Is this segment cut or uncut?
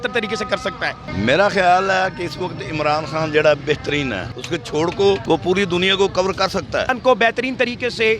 cut